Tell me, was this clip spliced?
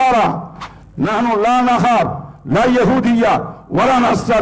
no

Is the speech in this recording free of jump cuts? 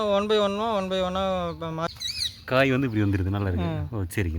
no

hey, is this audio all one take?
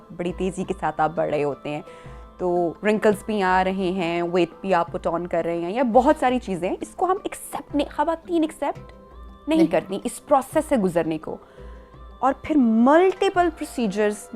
yes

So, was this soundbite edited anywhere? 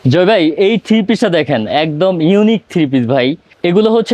no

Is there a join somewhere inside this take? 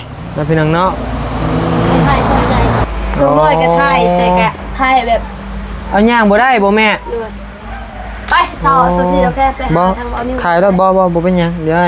yes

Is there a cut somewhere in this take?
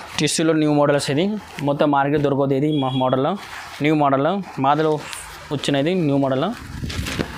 no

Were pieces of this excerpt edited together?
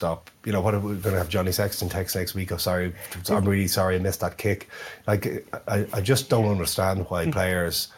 no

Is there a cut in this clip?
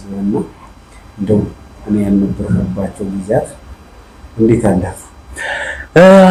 no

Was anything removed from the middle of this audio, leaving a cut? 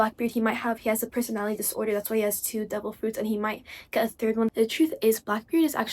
yes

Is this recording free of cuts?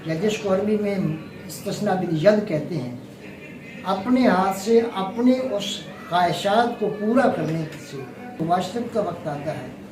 no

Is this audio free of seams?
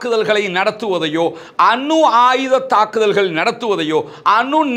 yes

